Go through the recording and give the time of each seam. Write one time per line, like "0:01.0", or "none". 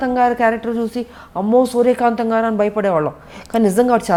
none